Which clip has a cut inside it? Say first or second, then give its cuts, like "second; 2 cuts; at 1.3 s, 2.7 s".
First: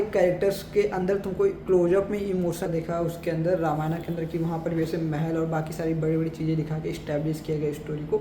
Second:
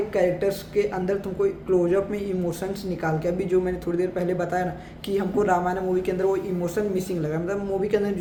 first; 1 cut; at 2.7 s